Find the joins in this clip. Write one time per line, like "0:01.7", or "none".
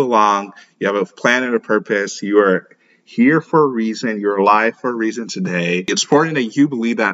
0:05.9